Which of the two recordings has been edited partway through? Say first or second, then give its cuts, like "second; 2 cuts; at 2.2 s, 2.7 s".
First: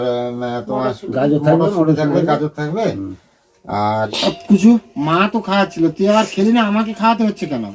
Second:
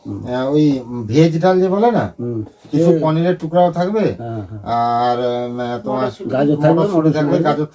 first; 1 cut; at 3.9 s